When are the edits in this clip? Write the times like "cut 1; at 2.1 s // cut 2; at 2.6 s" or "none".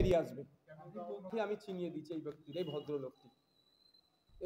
cut 1; at 1.3 s